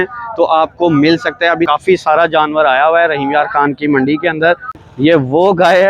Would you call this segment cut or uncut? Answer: cut